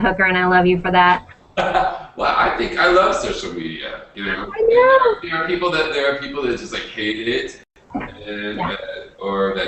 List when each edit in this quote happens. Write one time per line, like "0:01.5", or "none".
0:02.1